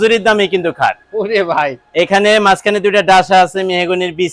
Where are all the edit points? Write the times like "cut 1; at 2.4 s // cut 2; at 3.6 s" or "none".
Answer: none